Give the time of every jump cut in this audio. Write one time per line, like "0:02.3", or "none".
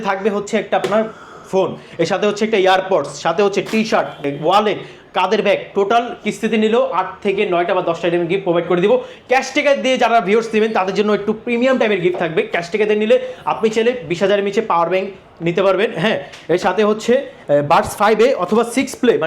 0:04.3